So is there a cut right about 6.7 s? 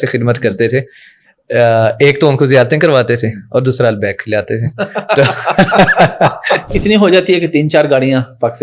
yes; 1 cut; at 6.7 s

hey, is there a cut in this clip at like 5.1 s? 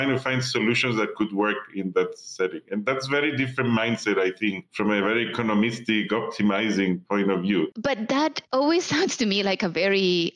no; 1 cut; at 7.7 s

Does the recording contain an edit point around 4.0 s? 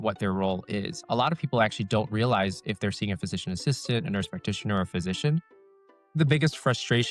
no; 2 cuts; at 1.0 s, 5.4 s

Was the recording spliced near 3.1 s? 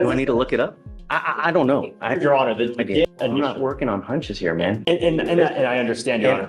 yes; 1 cut; at 3.1 s

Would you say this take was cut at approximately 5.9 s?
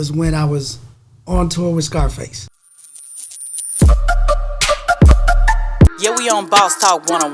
no; 1 cut; at 2.6 s

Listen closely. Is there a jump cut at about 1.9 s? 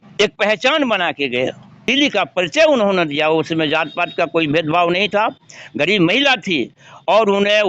yes; 1 cut; at 1.9 s

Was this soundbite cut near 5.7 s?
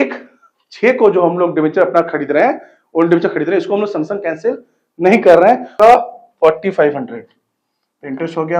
yes; 1 cut; at 5.7 s

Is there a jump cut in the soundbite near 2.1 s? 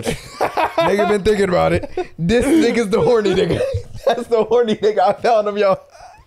no; 0 cuts

